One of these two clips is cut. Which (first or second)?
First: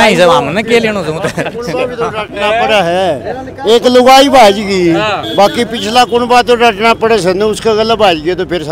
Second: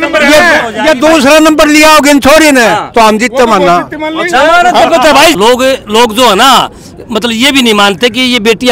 second